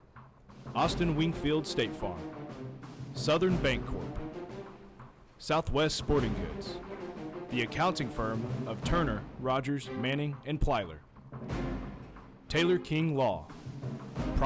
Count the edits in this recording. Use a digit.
2